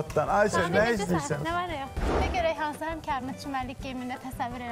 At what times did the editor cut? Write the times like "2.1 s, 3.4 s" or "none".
1.9 s

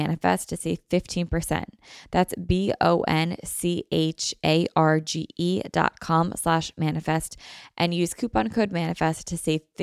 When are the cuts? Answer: none

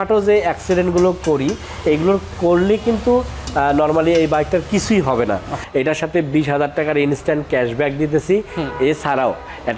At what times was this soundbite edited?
5.6 s

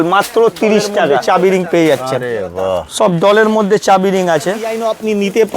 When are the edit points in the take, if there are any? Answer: 1.2 s, 4.7 s

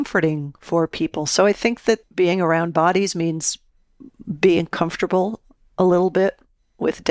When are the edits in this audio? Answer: none

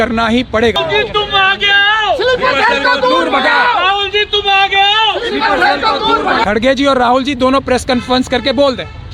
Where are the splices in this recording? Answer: 0.8 s, 6.4 s

